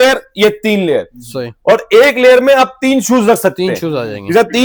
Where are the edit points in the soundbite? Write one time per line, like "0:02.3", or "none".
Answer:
none